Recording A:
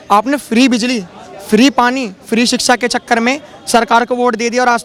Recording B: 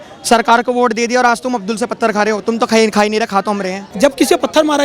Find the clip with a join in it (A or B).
B